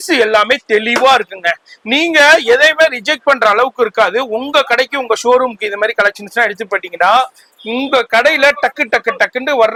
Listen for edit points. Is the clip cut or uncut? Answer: uncut